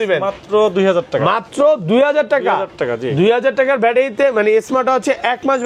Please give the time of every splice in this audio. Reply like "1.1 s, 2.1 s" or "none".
none